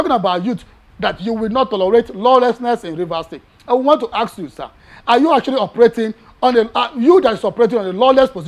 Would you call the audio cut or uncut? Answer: uncut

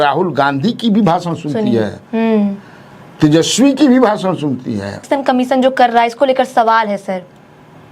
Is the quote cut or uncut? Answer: cut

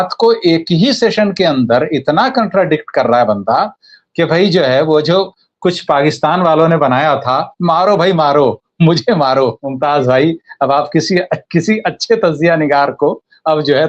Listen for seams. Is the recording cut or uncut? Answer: cut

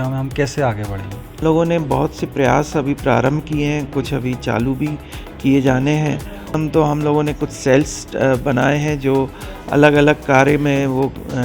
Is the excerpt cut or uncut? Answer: cut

